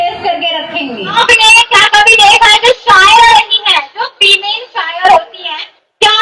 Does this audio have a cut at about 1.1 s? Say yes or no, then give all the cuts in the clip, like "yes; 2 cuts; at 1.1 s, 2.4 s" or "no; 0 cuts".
yes; 1 cut; at 1.1 s